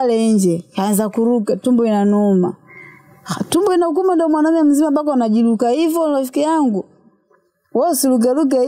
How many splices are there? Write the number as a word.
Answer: zero